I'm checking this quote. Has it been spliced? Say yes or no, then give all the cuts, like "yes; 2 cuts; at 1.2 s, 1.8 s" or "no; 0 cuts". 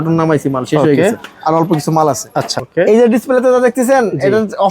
yes; 1 cut; at 2.6 s